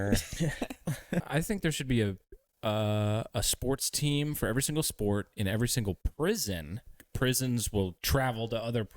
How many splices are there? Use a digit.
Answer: 2